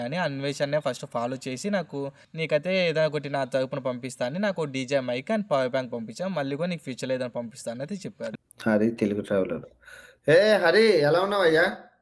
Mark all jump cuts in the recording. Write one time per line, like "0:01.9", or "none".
0:02.2
0:08.3